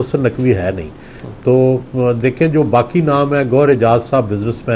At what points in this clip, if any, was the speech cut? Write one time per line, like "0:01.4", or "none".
none